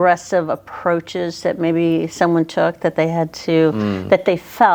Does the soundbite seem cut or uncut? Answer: uncut